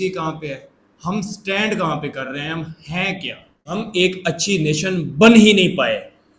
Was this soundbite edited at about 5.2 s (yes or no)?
no